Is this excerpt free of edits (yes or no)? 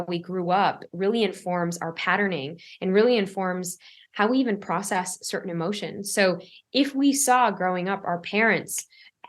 yes